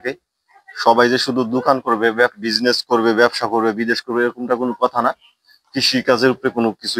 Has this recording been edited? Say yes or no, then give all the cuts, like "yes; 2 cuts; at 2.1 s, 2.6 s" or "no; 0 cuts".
no; 0 cuts